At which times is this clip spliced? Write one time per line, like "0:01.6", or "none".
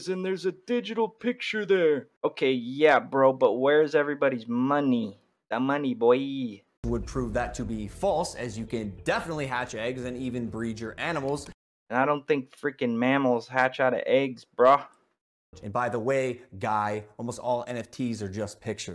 none